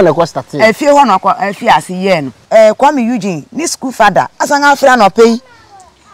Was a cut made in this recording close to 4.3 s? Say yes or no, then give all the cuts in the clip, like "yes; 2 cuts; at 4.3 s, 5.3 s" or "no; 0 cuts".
no; 1 cut; at 2.3 s